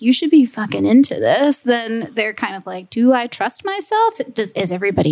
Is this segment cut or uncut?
uncut